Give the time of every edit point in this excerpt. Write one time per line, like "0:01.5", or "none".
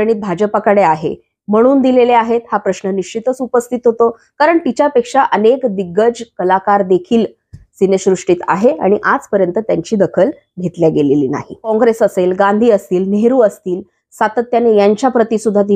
0:11.7